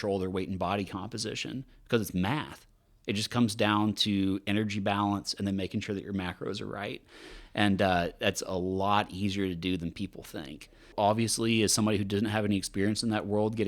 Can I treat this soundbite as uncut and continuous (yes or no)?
no